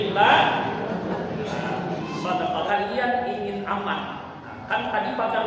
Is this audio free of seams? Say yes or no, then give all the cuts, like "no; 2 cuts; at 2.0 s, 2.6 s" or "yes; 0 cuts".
no; 1 cut; at 2.7 s